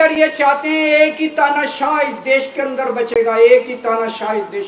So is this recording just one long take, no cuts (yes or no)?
yes